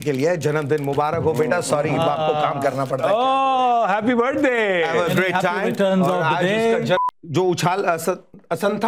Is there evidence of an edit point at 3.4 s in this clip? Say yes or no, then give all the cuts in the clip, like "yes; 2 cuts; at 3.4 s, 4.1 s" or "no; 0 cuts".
no; 1 cut; at 7.0 s